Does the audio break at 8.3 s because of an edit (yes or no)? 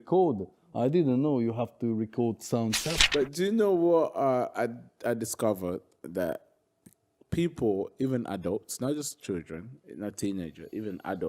no